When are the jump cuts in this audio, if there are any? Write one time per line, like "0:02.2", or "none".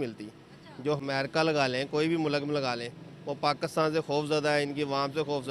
0:01.0